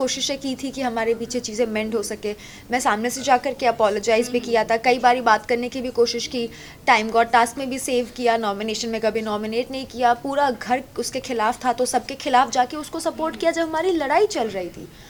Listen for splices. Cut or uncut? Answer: uncut